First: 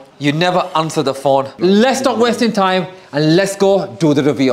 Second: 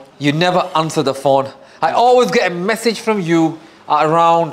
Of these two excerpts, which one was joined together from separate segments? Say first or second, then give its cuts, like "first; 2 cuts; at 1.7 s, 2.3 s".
first; 1 cut; at 1.5 s